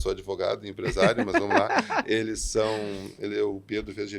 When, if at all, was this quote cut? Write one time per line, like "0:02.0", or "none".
none